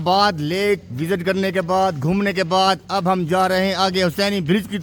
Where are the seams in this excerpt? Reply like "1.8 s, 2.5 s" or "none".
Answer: none